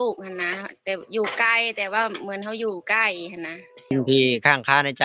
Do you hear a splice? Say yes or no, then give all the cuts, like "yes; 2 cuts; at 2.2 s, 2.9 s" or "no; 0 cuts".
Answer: yes; 1 cut; at 3.9 s